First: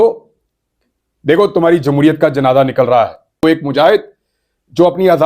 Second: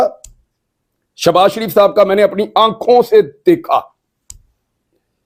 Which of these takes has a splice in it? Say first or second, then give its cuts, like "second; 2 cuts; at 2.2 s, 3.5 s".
first; 1 cut; at 3.4 s